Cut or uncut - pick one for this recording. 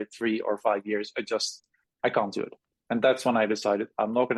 uncut